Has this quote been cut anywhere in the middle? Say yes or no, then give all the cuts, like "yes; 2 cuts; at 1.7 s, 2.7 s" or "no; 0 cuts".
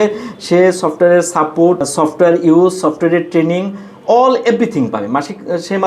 yes; 1 cut; at 1.8 s